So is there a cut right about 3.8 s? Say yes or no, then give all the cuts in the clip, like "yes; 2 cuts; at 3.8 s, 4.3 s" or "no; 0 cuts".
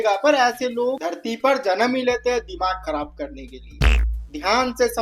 yes; 1 cut; at 3.8 s